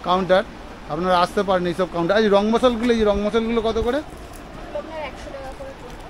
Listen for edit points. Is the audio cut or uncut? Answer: uncut